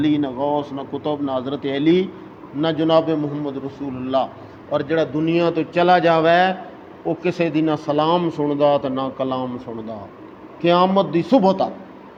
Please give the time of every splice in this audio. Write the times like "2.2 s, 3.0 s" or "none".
none